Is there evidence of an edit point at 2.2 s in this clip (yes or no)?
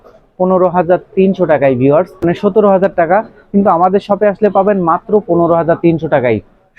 yes